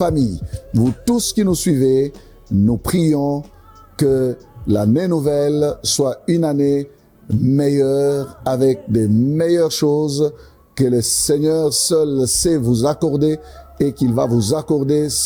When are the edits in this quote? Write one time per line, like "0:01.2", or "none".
none